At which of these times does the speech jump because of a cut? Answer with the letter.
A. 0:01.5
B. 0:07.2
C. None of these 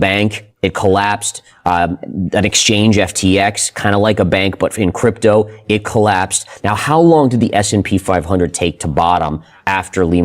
C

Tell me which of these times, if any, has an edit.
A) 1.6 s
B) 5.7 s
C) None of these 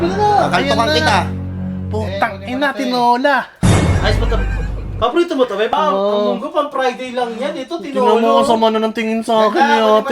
B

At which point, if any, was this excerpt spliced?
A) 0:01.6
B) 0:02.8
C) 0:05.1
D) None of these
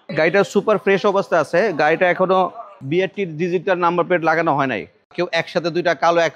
C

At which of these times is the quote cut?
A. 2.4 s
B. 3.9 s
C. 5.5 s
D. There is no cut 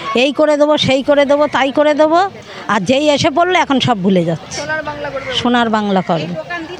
D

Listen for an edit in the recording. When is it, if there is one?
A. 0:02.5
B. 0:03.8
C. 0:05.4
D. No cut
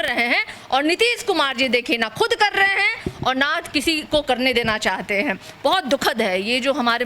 D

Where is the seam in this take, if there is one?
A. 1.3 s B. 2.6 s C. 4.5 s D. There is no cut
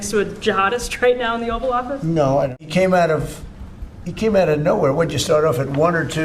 B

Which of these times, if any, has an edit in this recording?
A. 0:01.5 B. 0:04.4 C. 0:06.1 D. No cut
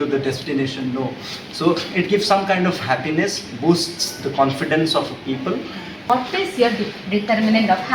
C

